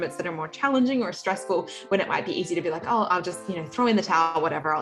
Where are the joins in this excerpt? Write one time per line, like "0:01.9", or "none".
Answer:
none